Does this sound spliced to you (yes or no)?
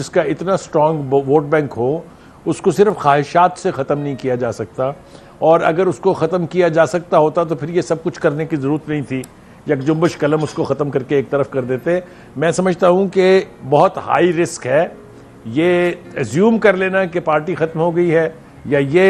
no